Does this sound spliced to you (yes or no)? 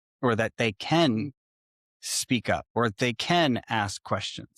yes